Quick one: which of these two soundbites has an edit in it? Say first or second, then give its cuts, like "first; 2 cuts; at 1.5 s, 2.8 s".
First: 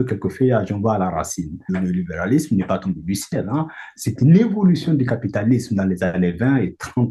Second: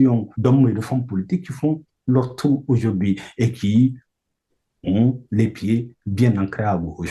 first; 1 cut; at 1.7 s